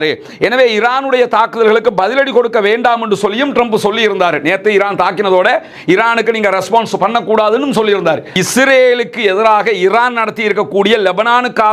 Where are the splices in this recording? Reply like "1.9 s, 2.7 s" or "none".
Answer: 8.3 s